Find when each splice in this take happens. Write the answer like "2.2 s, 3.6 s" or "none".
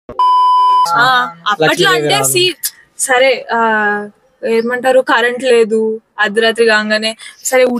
0.9 s